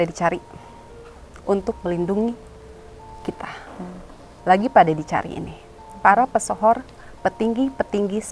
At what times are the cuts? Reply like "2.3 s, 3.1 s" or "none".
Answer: none